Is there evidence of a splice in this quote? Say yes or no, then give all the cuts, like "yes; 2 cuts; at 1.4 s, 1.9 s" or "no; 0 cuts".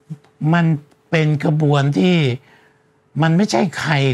no; 0 cuts